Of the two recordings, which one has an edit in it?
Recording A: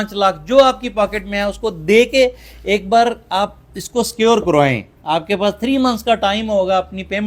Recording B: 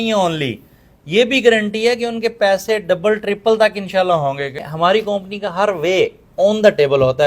B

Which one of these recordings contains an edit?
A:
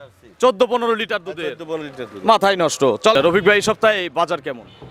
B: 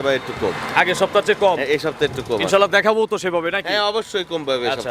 A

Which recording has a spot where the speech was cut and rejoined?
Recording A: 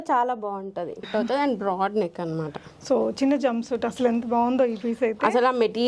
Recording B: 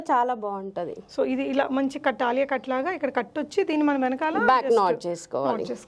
A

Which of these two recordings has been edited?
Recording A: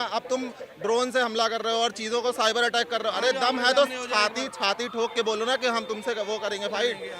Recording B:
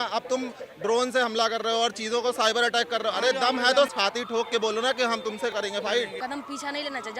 B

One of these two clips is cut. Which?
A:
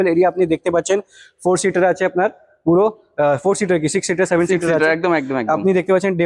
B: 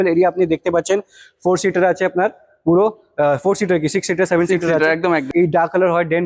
B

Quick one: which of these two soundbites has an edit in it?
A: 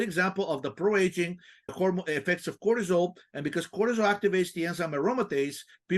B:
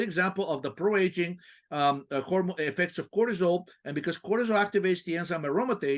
A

